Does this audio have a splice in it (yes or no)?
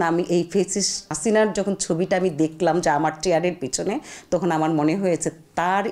yes